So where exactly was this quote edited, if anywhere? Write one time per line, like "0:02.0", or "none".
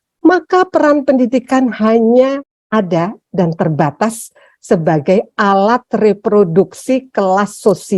0:02.5